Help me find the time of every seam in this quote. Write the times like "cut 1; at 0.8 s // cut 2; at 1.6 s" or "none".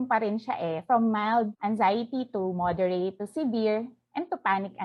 none